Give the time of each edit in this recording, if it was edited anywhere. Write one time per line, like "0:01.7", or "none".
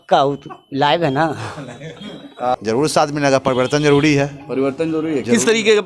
0:02.5